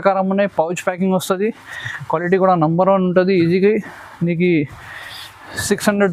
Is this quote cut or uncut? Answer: uncut